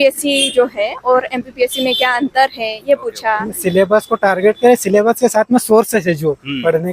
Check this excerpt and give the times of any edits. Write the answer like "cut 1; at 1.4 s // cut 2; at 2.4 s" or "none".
cut 1; at 3.5 s